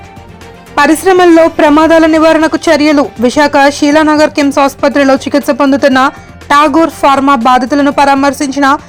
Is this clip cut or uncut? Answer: uncut